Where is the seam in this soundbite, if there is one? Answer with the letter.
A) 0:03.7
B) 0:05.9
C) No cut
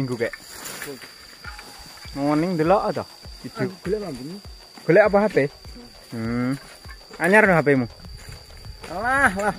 A